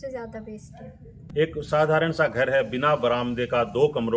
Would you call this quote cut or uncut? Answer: cut